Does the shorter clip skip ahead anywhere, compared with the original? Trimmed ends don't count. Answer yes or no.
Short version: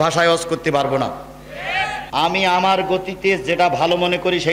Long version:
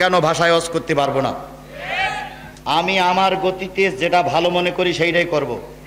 yes